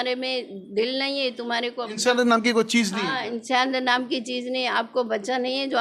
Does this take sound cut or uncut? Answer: uncut